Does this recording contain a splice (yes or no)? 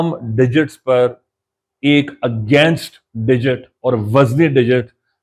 no